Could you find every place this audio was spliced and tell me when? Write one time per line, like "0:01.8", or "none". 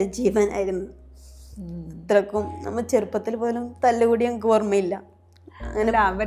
none